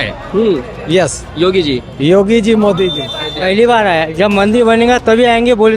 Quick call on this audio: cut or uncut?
cut